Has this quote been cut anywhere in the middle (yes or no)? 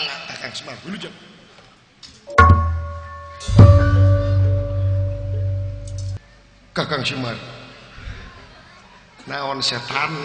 yes